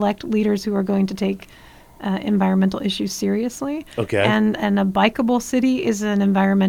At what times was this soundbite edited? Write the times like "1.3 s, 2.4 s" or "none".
none